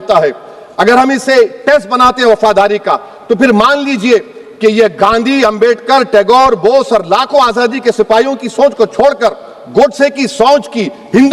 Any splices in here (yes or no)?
no